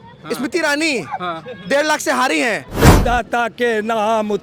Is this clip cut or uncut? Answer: cut